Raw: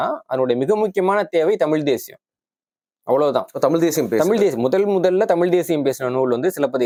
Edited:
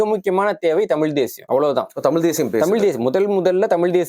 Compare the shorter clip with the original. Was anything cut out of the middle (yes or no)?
yes